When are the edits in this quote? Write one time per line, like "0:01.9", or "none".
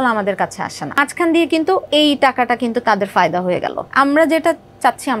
0:01.0
0:01.9
0:03.8